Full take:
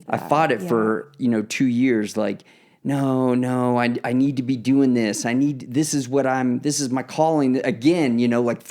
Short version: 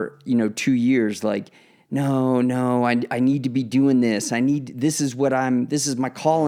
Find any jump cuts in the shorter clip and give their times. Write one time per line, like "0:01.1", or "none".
none